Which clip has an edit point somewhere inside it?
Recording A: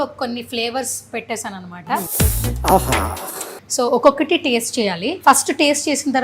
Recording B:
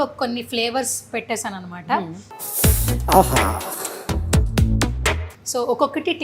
A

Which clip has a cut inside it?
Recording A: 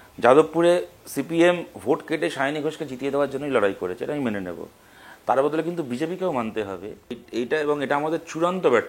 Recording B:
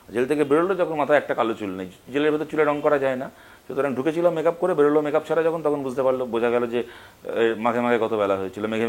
A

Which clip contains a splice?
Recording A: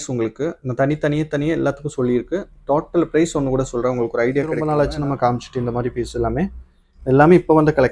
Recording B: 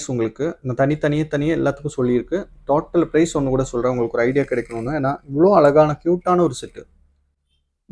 A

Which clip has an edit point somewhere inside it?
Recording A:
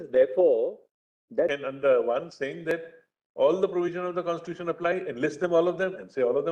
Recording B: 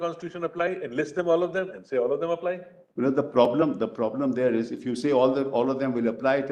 A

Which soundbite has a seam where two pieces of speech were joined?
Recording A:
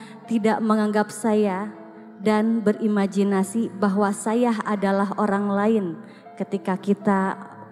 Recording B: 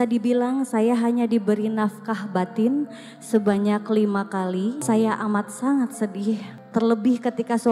B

